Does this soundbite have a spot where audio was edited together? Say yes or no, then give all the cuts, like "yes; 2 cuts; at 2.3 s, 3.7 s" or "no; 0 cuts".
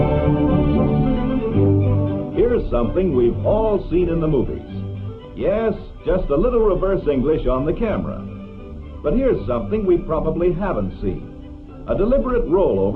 yes; 1 cut; at 3.7 s